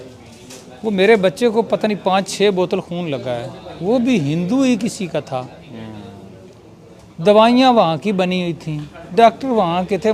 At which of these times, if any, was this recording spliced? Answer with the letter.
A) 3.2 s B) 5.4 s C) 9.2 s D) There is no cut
D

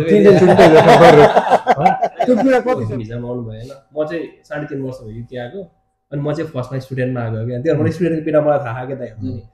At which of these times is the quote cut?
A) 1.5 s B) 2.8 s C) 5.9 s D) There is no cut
B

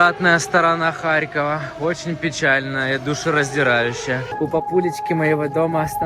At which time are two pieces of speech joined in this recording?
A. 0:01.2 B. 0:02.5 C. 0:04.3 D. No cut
C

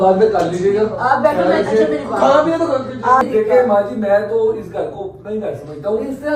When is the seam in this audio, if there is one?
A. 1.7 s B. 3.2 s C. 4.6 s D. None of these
B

